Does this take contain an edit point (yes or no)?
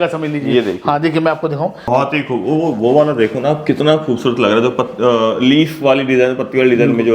yes